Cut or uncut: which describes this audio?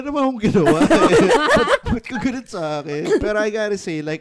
cut